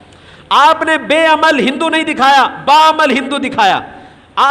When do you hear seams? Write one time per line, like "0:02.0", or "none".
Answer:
none